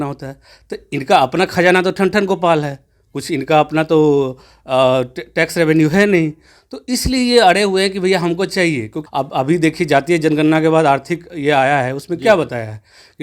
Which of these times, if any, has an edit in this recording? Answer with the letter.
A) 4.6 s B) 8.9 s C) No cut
B